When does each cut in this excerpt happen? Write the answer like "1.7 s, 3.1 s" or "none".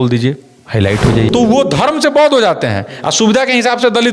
1.3 s